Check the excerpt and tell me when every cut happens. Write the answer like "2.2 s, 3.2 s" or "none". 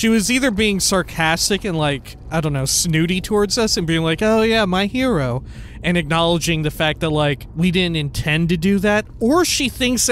2.1 s, 7.4 s, 9.1 s